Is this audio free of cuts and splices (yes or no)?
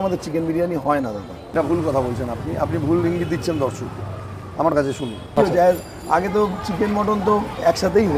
no